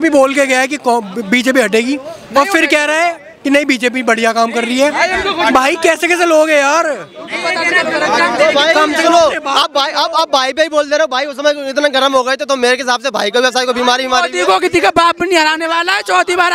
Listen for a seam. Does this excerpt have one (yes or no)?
no